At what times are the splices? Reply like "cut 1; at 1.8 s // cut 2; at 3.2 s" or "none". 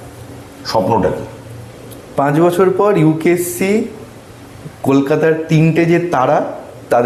none